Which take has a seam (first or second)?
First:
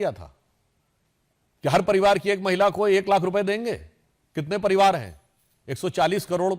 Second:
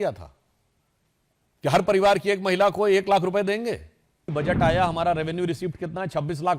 second